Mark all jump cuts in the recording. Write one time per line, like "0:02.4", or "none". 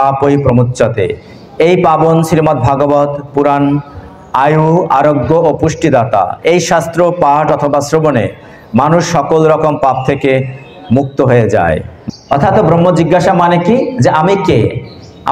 0:11.9